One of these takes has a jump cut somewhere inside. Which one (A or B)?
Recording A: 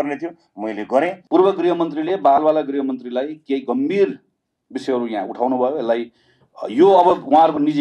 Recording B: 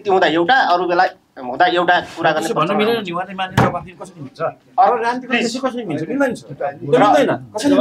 A